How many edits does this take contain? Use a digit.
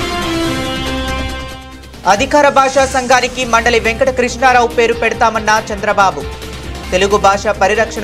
1